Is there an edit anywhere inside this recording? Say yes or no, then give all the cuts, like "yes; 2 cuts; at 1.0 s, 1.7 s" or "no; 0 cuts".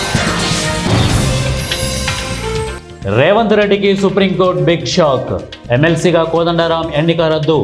yes; 1 cut; at 2.8 s